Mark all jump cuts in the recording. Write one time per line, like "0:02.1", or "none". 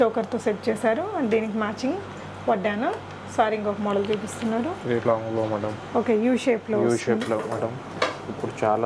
none